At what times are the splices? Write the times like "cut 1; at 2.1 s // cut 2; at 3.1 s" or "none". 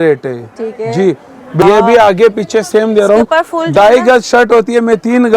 cut 1; at 1.6 s